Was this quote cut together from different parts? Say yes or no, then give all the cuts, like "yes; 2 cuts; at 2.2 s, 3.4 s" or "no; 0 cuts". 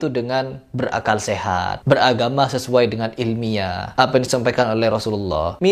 no; 0 cuts